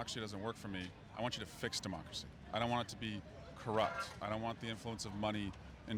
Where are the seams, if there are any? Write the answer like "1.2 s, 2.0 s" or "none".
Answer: none